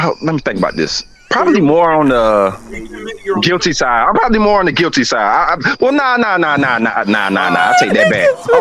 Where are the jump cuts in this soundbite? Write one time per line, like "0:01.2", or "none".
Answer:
none

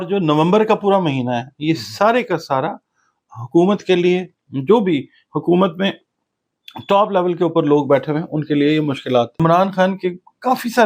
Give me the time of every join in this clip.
0:09.4

